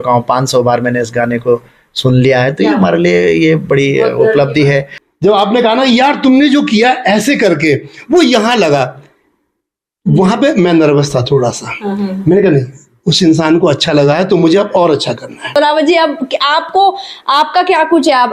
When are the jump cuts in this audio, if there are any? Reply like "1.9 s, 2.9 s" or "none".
5.0 s, 15.5 s